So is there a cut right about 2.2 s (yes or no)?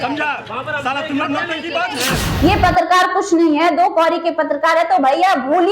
yes